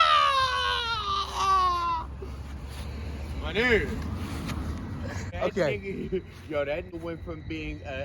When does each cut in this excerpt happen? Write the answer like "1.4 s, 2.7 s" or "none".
5.3 s, 6.9 s